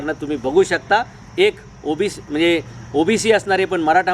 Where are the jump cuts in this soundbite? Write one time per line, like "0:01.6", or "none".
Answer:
none

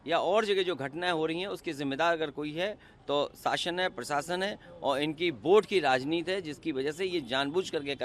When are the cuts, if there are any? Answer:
none

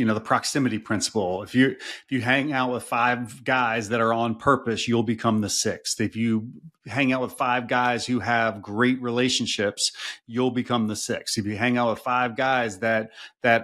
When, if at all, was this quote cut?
none

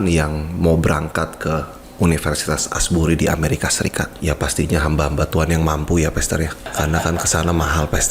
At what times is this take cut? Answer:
0:04.1
0:06.6

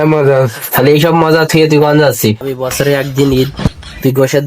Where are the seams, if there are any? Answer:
0:02.5

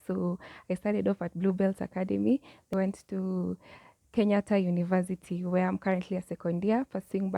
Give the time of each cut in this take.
0:02.7

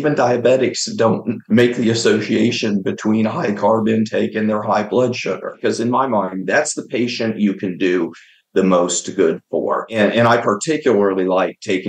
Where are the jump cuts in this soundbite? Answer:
0:05.5
0:09.9

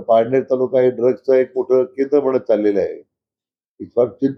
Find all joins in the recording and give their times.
none

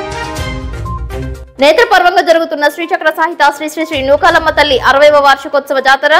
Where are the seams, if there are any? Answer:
0:01.4

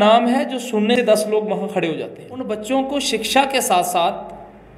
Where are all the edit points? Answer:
0:00.9
0:02.4

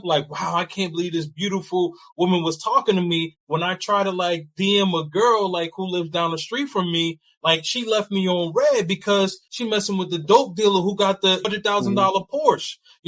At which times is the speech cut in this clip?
0:09.4
0:11.4

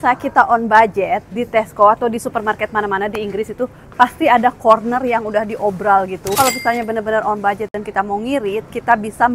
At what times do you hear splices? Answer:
none

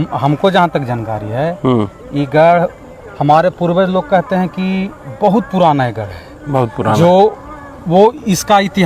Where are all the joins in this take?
none

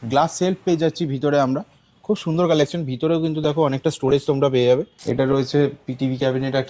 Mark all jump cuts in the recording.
0:04.9

